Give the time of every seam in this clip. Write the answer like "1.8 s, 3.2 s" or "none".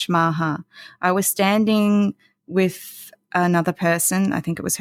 none